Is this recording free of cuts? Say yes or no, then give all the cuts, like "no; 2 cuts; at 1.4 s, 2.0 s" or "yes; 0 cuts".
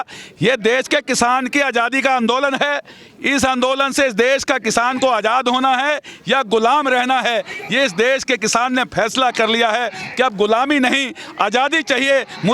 yes; 0 cuts